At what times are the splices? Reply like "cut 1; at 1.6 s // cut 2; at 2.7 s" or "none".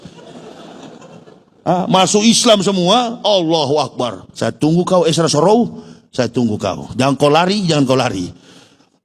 cut 1; at 4.2 s